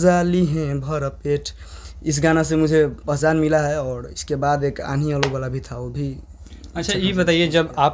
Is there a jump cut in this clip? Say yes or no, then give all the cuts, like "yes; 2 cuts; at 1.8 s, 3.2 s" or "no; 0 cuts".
no; 0 cuts